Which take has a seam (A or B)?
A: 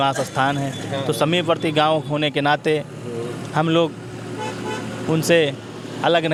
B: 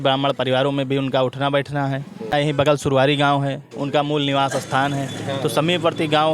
B